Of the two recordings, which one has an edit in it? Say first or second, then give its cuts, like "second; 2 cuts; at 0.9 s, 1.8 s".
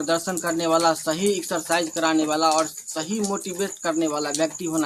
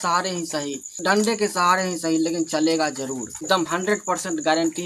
second; 2 cuts; at 1.0 s, 3.3 s